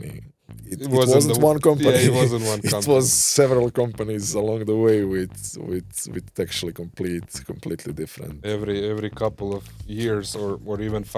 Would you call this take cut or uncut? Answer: uncut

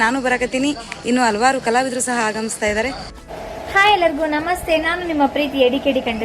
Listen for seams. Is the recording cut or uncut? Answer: cut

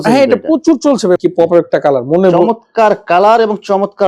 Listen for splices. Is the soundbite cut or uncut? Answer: cut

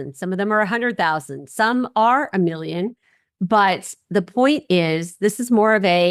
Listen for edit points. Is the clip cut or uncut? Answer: uncut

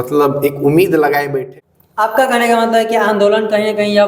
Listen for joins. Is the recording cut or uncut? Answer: cut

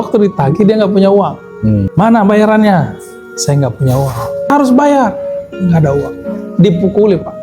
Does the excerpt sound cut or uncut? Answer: cut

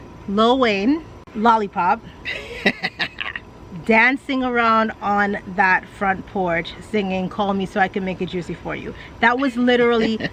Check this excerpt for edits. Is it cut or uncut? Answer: uncut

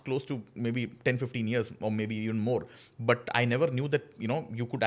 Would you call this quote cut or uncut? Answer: uncut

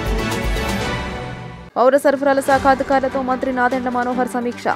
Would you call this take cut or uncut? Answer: cut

